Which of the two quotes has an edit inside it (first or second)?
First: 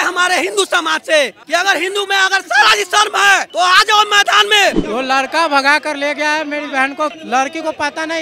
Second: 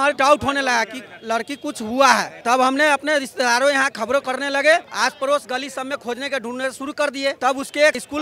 first